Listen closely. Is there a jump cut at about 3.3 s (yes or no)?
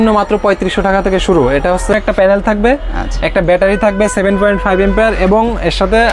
no